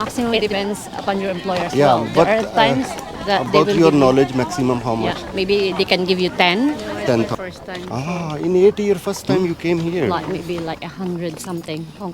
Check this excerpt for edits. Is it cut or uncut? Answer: cut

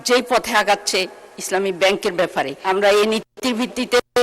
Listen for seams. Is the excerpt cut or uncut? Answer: cut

